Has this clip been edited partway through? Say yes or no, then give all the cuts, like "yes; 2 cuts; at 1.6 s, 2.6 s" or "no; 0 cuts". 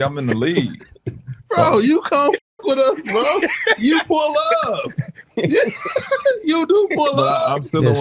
no; 0 cuts